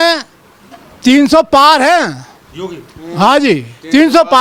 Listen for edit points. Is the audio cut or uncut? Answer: uncut